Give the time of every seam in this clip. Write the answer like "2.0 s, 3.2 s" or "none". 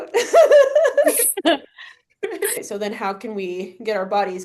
2.6 s